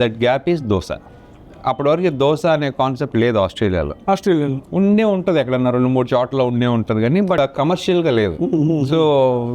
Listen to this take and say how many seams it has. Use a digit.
1